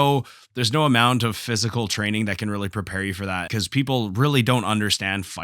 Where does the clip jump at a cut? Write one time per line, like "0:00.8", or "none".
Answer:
0:03.5